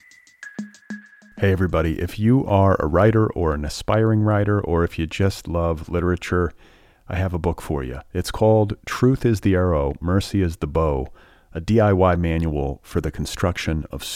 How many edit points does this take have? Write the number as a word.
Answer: one